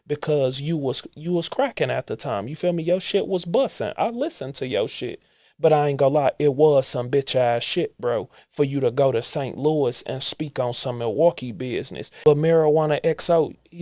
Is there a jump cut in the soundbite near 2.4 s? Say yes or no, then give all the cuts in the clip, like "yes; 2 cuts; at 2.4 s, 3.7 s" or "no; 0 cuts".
no; 1 cut; at 12.0 s